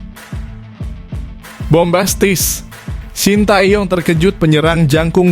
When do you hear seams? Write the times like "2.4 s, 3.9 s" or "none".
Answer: 1.7 s